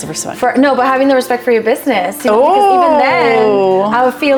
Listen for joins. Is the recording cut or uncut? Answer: uncut